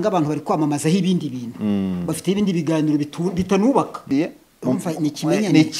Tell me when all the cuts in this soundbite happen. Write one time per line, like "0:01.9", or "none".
0:04.0